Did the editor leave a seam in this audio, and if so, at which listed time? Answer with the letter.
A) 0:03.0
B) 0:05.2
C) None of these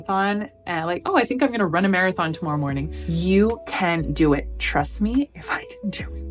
A